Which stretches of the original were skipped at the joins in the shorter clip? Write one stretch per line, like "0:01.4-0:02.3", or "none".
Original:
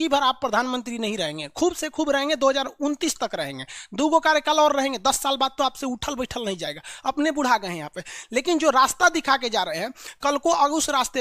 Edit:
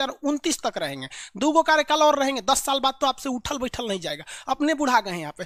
none

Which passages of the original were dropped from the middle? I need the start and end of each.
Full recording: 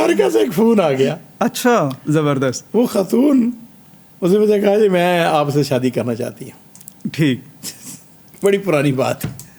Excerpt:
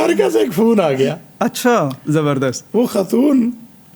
none

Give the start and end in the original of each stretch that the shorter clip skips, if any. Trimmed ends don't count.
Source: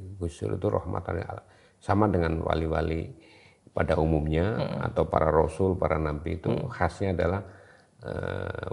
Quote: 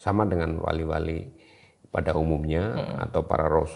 none

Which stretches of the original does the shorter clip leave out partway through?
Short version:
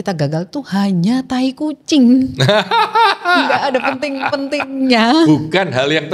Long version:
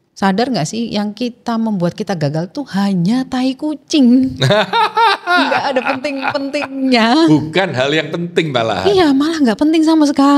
none

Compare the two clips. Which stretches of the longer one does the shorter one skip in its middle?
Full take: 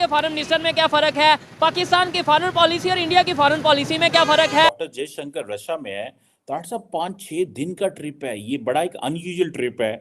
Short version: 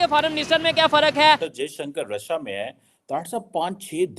0:01.5-0:04.9

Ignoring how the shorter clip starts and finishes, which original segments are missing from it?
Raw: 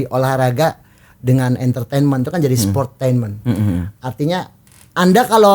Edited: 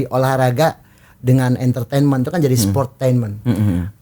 none

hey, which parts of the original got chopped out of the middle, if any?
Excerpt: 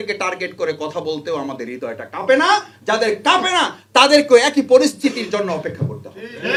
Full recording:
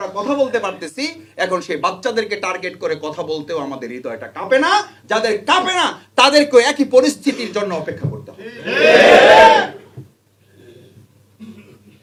none

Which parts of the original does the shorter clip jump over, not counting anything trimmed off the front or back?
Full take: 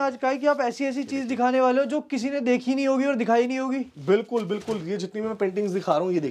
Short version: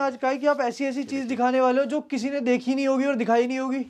none

